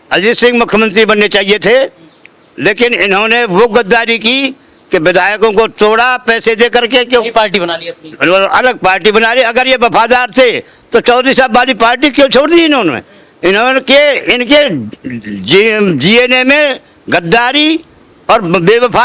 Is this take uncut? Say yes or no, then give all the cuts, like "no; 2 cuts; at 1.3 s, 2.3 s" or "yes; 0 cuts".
yes; 0 cuts